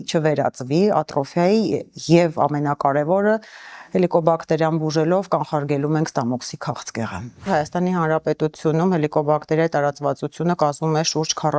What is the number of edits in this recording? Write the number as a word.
one